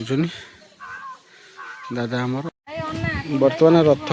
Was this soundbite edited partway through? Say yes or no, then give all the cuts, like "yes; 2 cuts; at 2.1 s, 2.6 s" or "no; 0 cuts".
yes; 1 cut; at 2.6 s